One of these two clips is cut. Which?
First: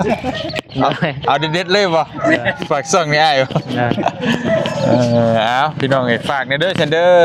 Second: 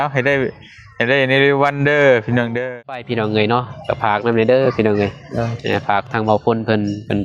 second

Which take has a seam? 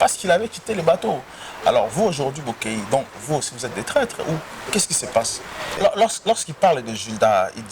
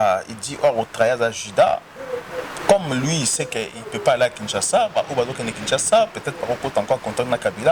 first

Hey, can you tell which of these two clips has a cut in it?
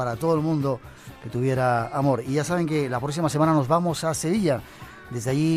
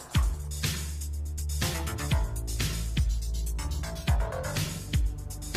first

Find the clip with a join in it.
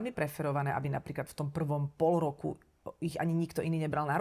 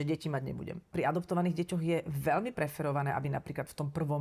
second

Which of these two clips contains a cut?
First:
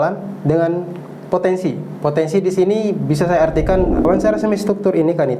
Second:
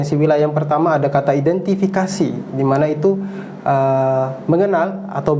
first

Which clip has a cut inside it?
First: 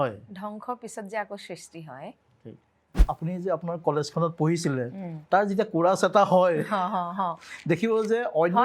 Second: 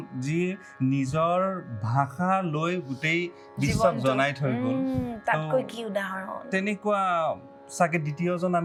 first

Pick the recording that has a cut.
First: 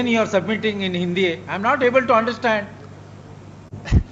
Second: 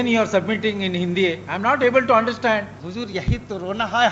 second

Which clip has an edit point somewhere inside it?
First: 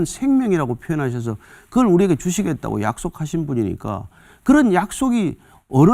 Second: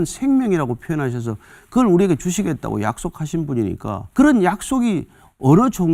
second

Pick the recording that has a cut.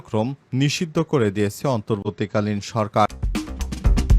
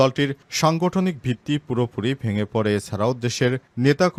first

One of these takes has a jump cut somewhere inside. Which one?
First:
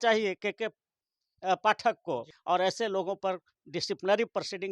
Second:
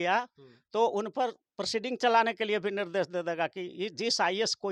first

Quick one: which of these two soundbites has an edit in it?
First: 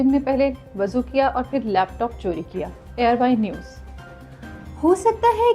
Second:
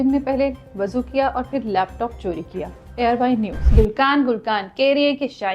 second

